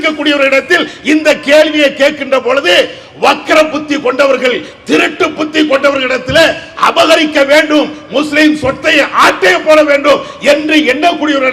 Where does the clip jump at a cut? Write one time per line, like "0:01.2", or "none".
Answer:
none